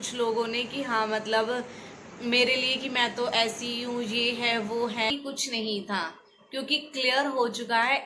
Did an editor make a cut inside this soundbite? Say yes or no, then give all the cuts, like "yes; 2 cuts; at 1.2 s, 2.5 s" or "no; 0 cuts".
yes; 1 cut; at 5.1 s